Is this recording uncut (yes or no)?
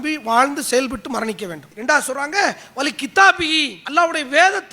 no